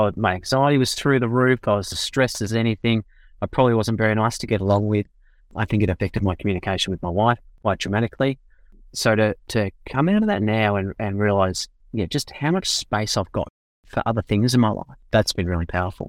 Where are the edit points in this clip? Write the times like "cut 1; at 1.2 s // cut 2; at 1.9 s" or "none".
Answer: cut 1; at 14.9 s